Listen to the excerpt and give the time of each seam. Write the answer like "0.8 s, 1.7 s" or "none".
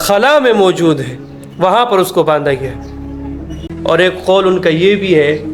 3.7 s